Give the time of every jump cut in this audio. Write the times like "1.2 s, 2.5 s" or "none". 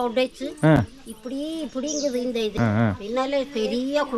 2.6 s